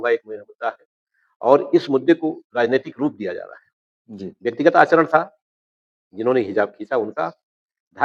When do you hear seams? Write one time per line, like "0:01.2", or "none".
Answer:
none